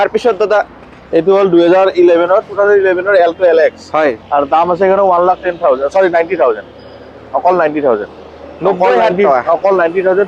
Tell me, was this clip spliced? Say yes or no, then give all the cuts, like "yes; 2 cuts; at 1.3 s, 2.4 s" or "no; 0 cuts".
no; 0 cuts